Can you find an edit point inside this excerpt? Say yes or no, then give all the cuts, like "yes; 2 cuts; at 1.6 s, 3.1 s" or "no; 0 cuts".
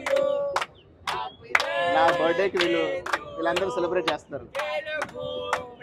no; 0 cuts